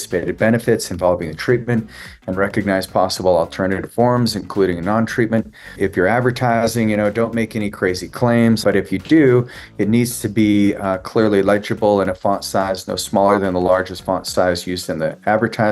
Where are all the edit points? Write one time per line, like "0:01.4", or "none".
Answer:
0:05.7
0:08.6